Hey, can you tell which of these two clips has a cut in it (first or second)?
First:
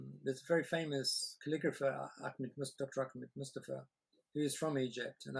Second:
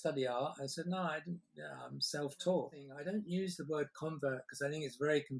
second